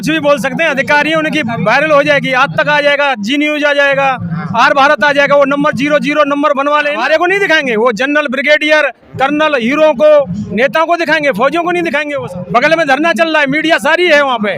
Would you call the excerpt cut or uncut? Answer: cut